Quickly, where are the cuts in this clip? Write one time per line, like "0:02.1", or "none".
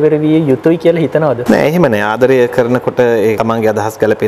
0:01.4
0:03.4